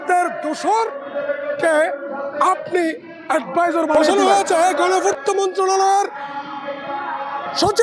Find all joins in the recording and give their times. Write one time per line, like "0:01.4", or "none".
0:04.1